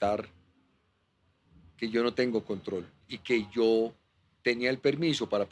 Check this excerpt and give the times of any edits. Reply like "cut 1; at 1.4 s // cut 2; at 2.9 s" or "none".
cut 1; at 3.1 s

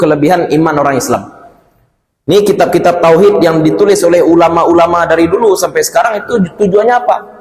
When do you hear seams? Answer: none

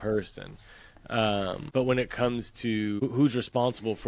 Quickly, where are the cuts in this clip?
cut 1; at 1.6 s // cut 2; at 3.0 s

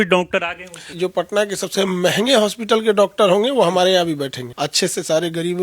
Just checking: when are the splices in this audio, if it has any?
cut 1; at 0.9 s // cut 2; at 4.4 s

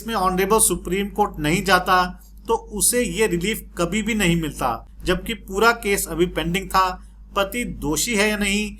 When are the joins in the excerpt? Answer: cut 1; at 4.9 s

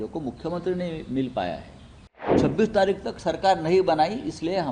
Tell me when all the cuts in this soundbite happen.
cut 1; at 2.3 s

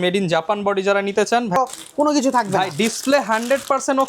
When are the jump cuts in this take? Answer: cut 1; at 1.6 s

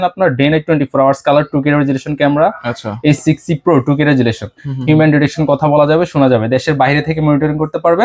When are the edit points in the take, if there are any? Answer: none

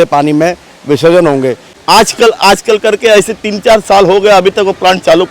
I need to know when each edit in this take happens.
cut 1; at 1.7 s

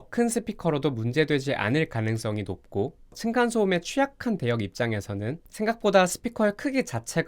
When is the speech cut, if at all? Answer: cut 1; at 3.2 s

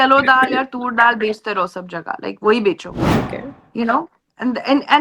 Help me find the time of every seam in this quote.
cut 1; at 3.2 s

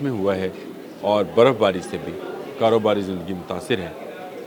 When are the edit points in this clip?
none

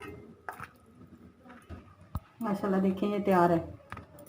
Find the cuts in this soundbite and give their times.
cut 1; at 1.7 s

